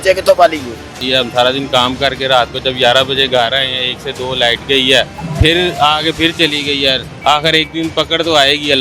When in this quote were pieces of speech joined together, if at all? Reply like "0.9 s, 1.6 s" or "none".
1.0 s, 5.2 s, 7.1 s